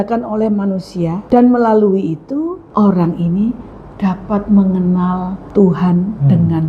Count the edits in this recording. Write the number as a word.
three